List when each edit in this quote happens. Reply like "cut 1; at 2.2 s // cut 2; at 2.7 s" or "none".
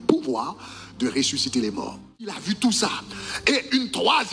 cut 1; at 2.4 s